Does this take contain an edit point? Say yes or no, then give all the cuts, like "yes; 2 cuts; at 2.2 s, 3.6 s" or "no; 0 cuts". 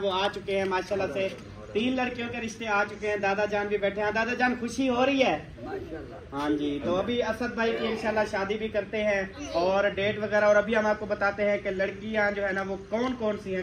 yes; 1 cut; at 9.4 s